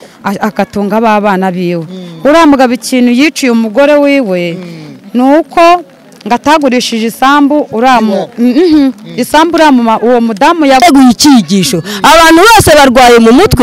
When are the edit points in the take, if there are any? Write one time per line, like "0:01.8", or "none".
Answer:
0:10.8